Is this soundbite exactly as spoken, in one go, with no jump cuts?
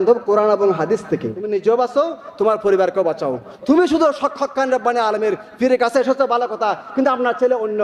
no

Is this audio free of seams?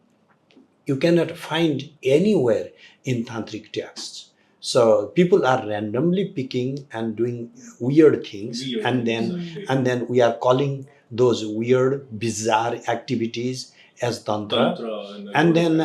yes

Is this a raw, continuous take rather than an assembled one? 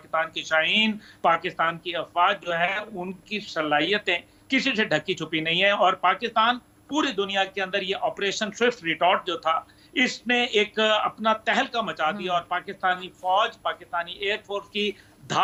yes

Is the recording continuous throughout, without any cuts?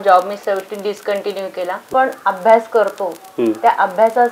no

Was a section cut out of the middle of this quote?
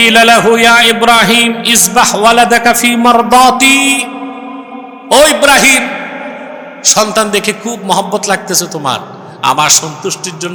no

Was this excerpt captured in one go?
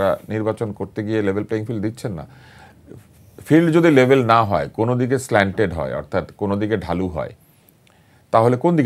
yes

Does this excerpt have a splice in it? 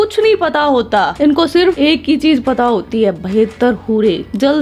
no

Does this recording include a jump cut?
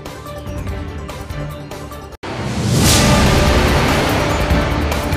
yes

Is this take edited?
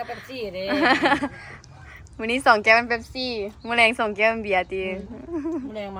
no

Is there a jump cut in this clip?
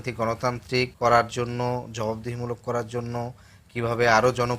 yes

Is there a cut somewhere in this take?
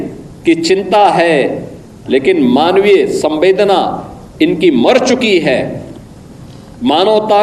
no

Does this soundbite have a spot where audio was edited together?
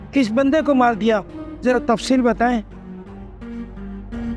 no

